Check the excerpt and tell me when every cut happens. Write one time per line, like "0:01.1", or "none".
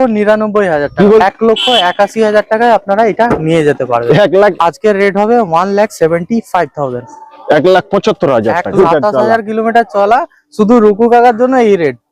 0:01.2
0:04.6
0:08.7